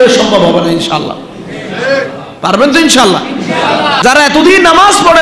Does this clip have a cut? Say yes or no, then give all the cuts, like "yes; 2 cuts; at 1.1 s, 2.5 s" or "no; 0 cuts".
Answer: yes; 1 cut; at 4.0 s